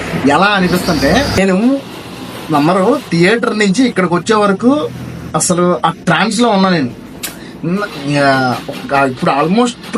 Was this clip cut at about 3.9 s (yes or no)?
no